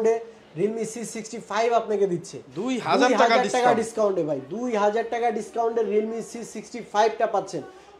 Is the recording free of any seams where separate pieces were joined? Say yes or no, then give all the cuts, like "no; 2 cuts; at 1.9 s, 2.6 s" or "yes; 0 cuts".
yes; 0 cuts